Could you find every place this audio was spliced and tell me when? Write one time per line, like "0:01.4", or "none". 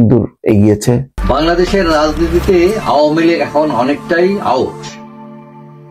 0:01.1